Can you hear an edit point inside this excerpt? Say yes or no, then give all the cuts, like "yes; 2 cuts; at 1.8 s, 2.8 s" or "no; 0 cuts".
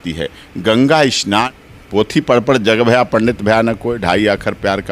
yes; 1 cut; at 1.5 s